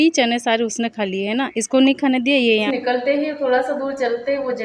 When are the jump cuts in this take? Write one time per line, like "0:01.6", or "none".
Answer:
0:02.7

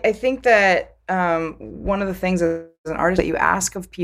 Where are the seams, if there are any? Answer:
none

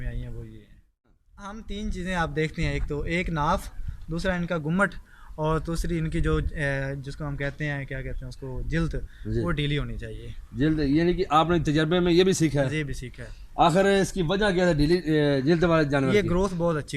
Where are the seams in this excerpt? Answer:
0:01.2

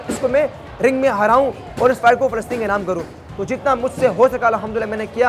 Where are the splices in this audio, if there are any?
none

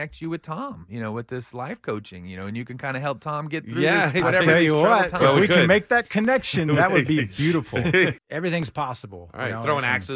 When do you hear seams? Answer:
0:08.1

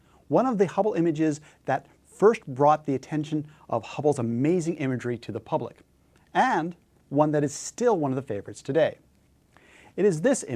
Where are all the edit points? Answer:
0:03.6

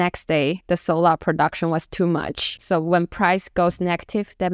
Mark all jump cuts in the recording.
0:02.6

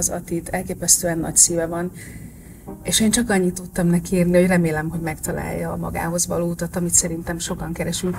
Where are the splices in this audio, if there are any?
none

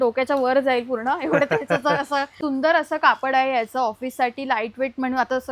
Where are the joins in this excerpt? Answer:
0:02.3

